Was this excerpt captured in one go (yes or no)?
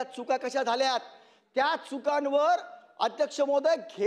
yes